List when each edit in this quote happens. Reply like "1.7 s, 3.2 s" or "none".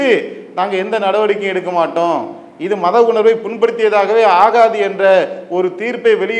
none